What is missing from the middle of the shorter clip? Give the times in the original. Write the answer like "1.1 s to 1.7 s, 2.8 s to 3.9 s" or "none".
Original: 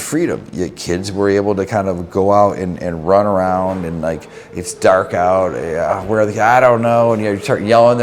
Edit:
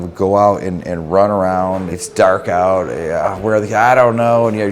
3.9 s to 4.6 s

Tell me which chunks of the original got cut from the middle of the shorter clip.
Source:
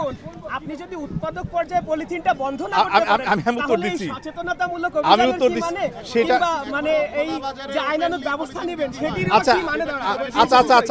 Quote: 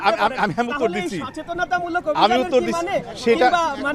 none

